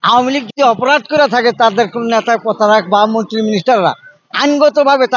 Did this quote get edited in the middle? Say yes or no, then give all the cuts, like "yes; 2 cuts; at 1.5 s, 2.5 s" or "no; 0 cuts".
no; 0 cuts